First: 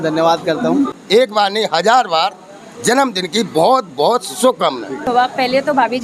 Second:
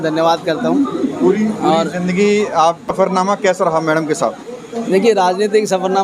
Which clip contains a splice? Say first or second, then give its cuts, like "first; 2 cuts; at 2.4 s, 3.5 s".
first; 2 cuts; at 1.2 s, 5.0 s